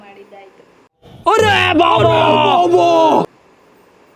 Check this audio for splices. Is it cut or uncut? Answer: uncut